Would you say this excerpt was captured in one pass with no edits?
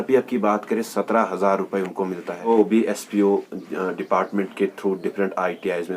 no; 1 cut; at 2.5 s

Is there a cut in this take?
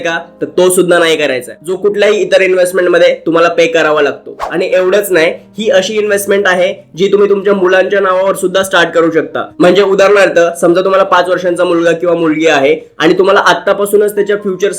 no; 0 cuts

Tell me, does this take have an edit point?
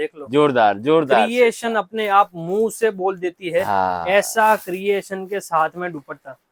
no; 0 cuts

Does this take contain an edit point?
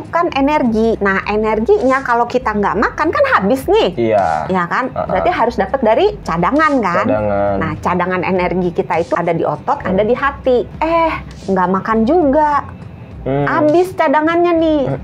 yes; 4 cuts; at 1.0 s, 6.2 s, 9.1 s, 10.7 s

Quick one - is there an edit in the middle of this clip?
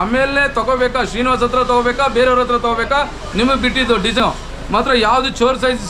no; 0 cuts

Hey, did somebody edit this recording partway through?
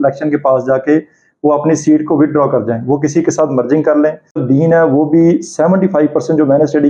yes; 1 cut; at 4.4 s

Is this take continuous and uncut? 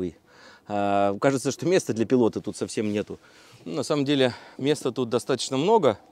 yes; 0 cuts

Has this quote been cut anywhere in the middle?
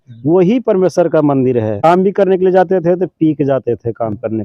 yes; 1 cut; at 1.8 s

